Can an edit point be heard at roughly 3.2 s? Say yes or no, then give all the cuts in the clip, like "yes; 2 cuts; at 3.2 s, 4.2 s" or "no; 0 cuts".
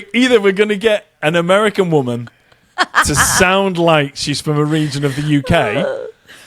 no; 0 cuts